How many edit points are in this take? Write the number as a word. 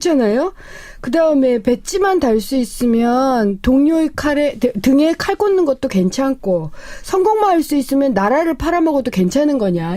one